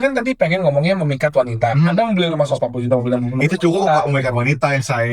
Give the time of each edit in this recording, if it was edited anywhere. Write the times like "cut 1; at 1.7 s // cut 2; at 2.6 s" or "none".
none

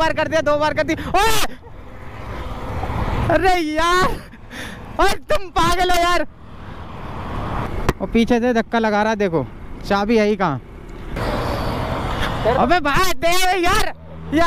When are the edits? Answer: cut 1; at 2.6 s // cut 2; at 7.6 s // cut 3; at 11.1 s

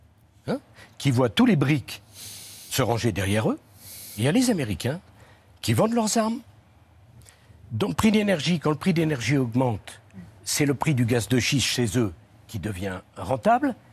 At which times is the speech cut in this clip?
none

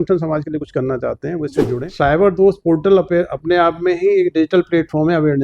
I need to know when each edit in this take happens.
cut 1; at 1.8 s

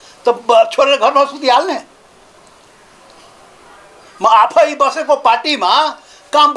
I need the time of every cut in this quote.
none

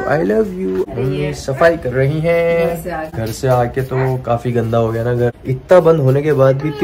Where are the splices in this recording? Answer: cut 1; at 0.8 s // cut 2; at 3.1 s // cut 3; at 5.4 s

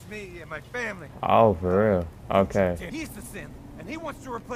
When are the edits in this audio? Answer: cut 1; at 1.1 s // cut 2; at 2.2 s // cut 3; at 2.9 s

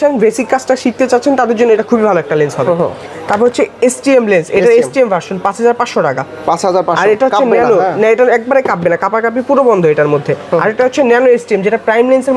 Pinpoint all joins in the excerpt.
none

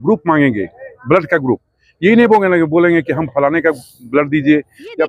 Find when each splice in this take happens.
none

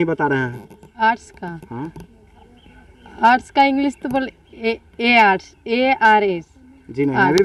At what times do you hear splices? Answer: none

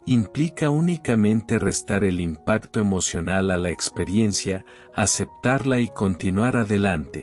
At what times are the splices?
none

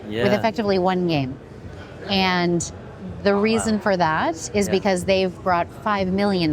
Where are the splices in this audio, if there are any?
none

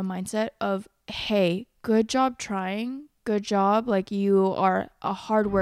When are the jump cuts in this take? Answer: none

